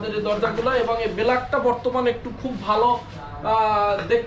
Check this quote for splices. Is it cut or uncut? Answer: uncut